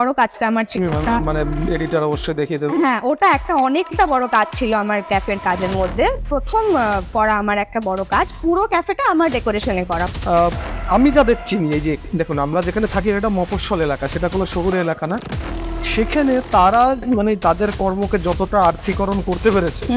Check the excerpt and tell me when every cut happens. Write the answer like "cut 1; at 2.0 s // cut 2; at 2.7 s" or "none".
cut 1; at 10.1 s